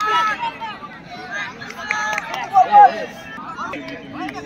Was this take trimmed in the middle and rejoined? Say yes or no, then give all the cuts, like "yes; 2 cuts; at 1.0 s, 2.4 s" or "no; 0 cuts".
yes; 1 cut; at 3.2 s